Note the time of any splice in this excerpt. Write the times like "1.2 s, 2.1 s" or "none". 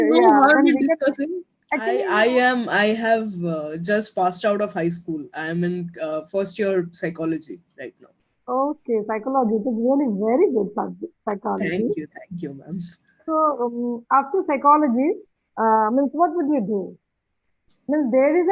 2.0 s